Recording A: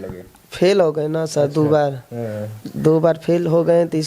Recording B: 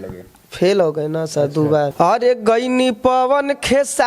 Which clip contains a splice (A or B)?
B